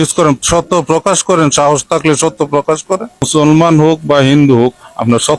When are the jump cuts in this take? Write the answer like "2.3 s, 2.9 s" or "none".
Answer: 3.3 s